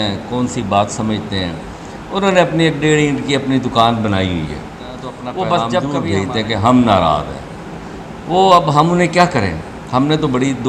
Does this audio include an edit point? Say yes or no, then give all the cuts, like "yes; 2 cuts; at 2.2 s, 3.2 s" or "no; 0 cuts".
yes; 1 cut; at 5.8 s